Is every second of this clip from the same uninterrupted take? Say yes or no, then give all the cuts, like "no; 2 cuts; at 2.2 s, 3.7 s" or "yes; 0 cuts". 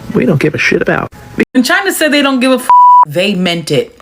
no; 1 cut; at 1.5 s